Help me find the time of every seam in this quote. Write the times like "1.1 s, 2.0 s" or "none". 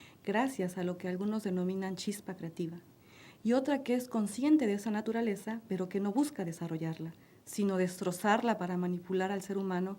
5.1 s